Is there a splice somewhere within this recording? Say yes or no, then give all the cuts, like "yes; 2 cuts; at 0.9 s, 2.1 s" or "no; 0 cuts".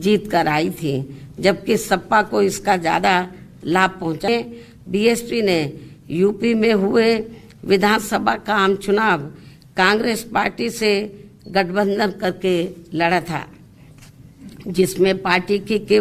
yes; 1 cut; at 4.3 s